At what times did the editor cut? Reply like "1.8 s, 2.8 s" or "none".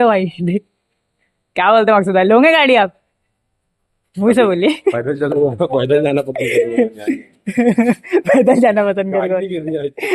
none